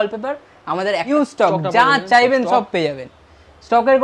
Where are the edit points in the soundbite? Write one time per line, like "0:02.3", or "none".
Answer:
0:01.1

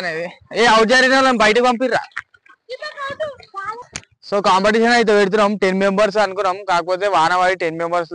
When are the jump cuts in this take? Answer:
0:03.9

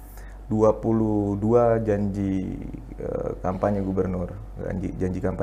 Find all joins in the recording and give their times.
none

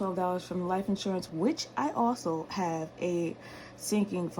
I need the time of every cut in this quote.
0:01.3

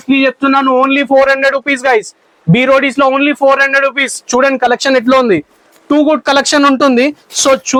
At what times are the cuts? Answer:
none

